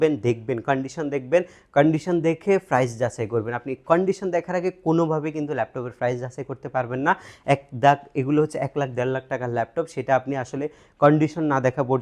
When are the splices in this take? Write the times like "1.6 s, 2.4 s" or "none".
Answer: none